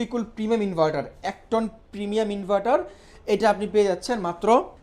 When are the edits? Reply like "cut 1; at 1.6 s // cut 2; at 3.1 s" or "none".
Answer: none

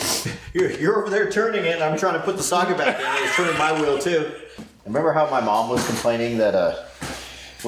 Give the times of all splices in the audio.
cut 1; at 4.6 s

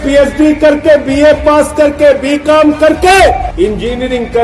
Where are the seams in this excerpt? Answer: cut 1; at 3.5 s

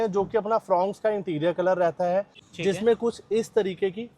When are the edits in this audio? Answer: cut 1; at 2.4 s

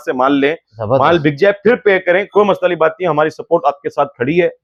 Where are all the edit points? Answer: none

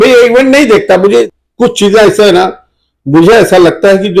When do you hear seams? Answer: cut 1; at 1.3 s

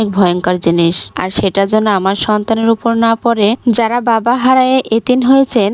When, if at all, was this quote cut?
none

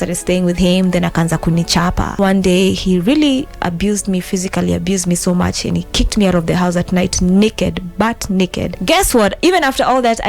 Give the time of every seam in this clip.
cut 1; at 2.2 s // cut 2; at 8.7 s

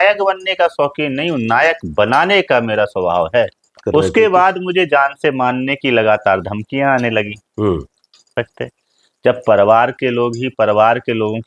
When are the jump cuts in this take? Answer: cut 1; at 3.8 s // cut 2; at 8.3 s

